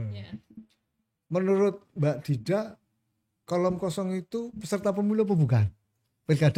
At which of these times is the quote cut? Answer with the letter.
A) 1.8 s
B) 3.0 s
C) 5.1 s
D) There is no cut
D